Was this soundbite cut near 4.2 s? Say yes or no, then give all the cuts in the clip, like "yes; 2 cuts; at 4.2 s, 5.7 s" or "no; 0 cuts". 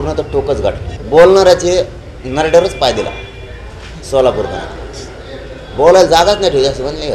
no; 1 cut; at 0.9 s